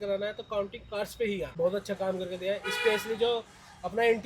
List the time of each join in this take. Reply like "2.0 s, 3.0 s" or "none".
1.5 s